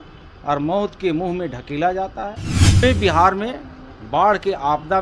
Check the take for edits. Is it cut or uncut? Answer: cut